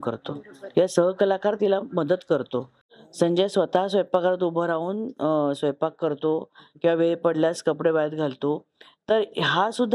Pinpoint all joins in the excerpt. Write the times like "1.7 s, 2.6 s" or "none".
2.9 s